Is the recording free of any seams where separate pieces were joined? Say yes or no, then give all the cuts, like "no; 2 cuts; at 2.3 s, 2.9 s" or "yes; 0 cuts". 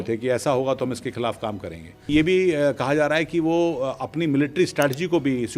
no; 1 cut; at 2.1 s